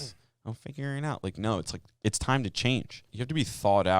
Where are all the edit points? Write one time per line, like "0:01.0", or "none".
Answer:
0:03.0